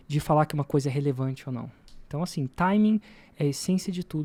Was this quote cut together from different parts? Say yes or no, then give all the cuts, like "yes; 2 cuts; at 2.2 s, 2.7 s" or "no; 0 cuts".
no; 0 cuts